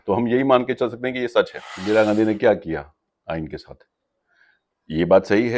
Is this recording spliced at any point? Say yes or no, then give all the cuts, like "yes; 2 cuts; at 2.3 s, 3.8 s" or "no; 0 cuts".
yes; 1 cut; at 1.7 s